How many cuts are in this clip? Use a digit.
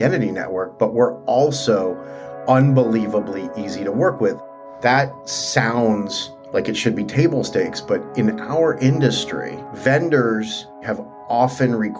2